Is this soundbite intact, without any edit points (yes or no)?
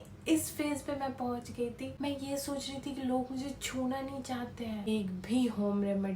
no